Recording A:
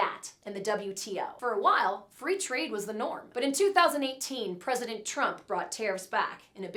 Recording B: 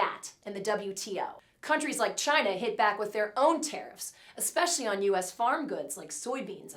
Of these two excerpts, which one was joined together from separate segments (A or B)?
B